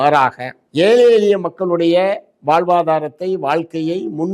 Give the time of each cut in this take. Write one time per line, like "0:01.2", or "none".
none